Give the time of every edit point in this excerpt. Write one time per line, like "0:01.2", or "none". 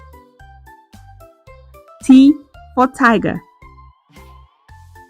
0:01.5
0:03.4